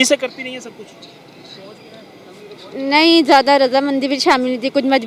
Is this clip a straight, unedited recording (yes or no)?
yes